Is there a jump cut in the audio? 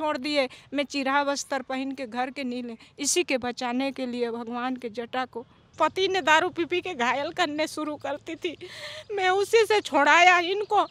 yes; 1 cut; at 5.7 s

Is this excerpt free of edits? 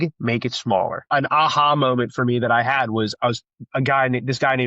no; 1 cut; at 1.1 s

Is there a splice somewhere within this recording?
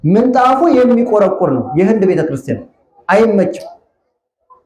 no; 0 cuts

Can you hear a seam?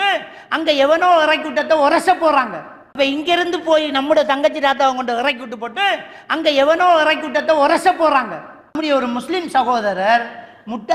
yes; 2 cuts; at 3.0 s, 8.8 s

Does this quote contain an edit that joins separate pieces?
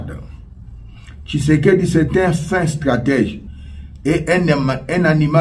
yes; 1 cut; at 3.4 s

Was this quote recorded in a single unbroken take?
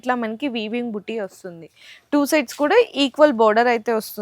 yes; 0 cuts

